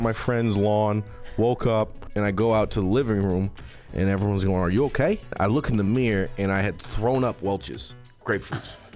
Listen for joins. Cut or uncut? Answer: cut